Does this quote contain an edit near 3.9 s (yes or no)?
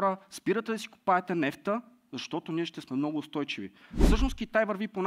yes